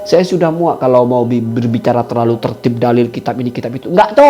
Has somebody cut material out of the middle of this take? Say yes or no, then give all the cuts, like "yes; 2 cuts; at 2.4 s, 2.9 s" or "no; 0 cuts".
no; 0 cuts